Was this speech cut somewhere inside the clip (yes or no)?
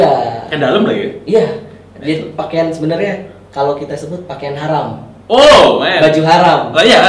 no